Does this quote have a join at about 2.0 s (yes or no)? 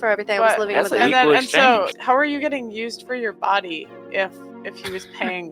yes